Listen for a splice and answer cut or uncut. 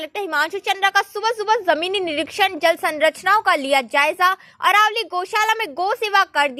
uncut